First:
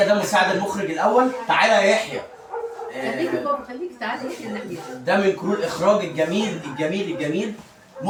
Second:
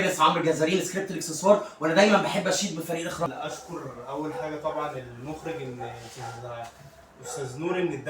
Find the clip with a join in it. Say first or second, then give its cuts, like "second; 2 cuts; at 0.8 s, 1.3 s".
second; 1 cut; at 3.3 s